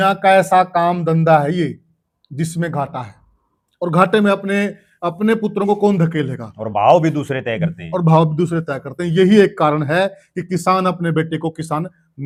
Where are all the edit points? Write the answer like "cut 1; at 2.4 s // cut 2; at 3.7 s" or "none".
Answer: none